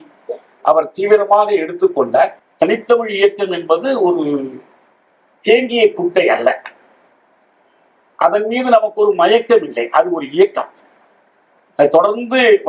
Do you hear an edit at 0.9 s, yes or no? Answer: no